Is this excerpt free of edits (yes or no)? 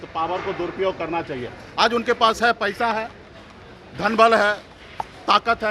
yes